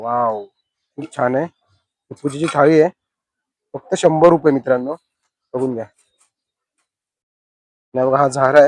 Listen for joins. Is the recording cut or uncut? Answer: uncut